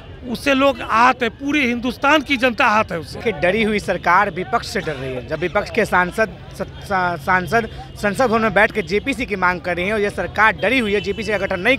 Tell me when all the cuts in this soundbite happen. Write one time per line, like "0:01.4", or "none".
0:03.1